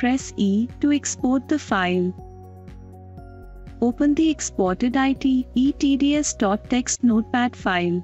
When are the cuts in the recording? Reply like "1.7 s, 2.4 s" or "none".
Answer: 2.3 s, 3.8 s